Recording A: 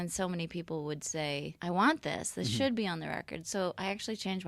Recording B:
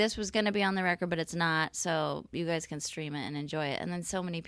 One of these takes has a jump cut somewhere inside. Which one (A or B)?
A